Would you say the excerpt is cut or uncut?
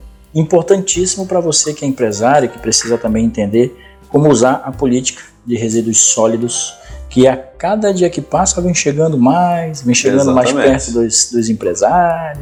uncut